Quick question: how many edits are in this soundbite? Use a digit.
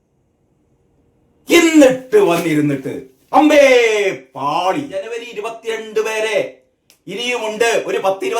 1